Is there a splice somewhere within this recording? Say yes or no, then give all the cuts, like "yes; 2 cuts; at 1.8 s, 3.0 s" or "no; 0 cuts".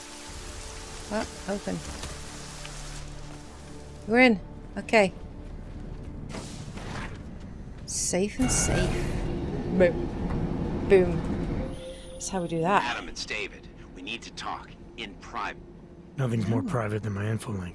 yes; 1 cut; at 4.3 s